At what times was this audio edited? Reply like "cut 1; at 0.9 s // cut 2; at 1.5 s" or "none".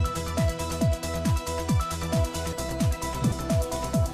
none